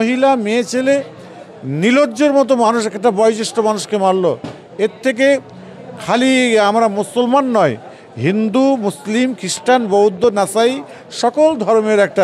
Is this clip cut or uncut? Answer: uncut